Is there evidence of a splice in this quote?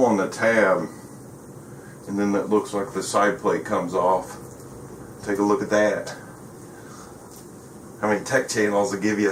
no; 0 cuts

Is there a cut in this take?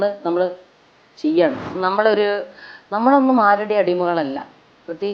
yes; 1 cut; at 1.7 s

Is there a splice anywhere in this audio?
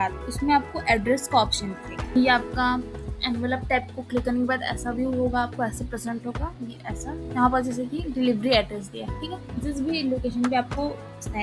yes; 2 cuts; at 1.9 s, 6.7 s

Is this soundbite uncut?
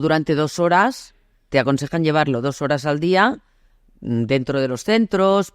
yes; 0 cuts

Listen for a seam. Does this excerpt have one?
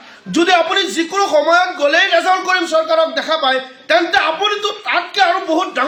no; 0 cuts

